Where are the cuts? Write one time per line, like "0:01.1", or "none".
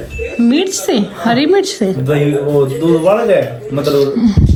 none